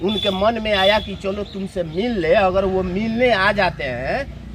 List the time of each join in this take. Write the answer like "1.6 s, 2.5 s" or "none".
none